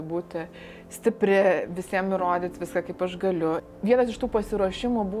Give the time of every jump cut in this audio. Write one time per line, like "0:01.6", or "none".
0:03.6